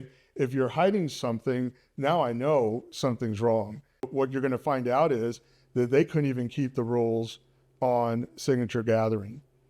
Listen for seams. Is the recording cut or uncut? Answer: cut